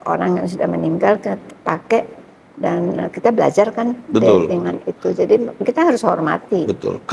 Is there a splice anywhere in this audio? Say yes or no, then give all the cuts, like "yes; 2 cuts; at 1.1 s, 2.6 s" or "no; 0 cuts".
no; 0 cuts